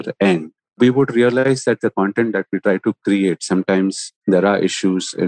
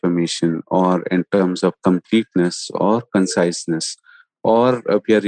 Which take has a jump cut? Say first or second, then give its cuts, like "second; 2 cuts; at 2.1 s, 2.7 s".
first; 3 cuts; at 0.8 s, 1.4 s, 4.1 s